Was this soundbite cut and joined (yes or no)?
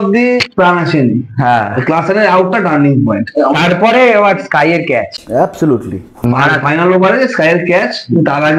no